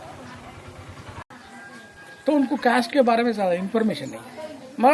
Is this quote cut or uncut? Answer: cut